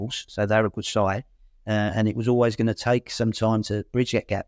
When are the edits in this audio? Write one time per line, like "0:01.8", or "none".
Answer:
none